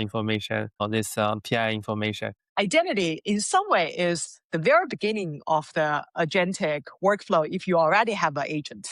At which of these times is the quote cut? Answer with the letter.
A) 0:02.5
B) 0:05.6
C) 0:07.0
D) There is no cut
A